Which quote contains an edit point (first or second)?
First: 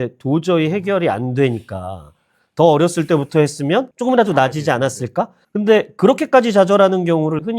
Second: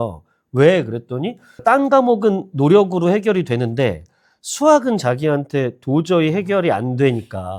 first